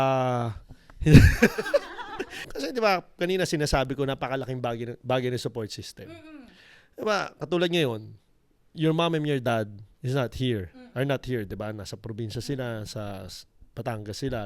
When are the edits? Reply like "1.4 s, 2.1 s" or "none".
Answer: 2.5 s